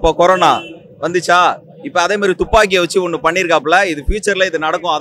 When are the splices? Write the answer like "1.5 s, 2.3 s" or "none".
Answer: none